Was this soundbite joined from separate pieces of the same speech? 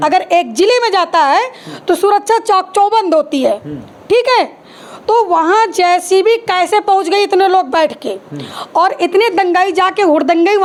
no; 0 cuts

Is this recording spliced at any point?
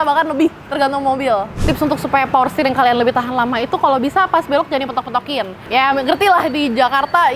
yes; 1 cut; at 1.6 s

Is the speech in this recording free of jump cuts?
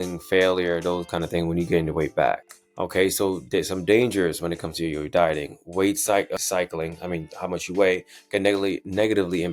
yes; 0 cuts

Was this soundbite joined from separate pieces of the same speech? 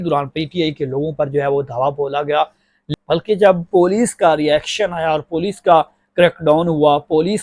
yes; 1 cut; at 2.8 s

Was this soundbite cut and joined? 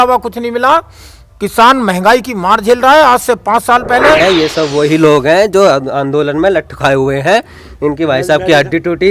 yes; 1 cut; at 4.2 s

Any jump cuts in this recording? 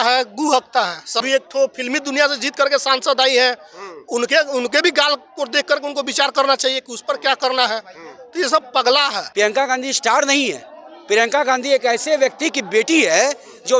yes; 2 cuts; at 1.2 s, 9.2 s

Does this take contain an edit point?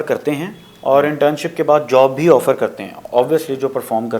no; 0 cuts

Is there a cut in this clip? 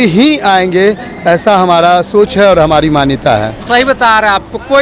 yes; 1 cut; at 3.6 s

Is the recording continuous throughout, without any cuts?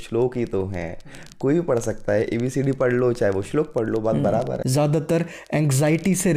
no; 1 cut; at 4.6 s

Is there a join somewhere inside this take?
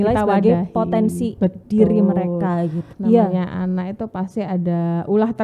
yes; 1 cut; at 2.9 s

